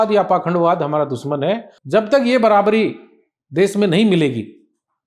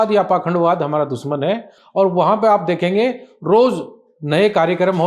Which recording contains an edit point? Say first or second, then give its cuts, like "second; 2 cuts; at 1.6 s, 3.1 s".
first; 1 cut; at 1.7 s